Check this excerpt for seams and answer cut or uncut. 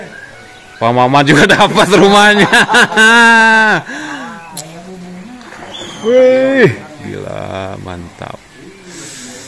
cut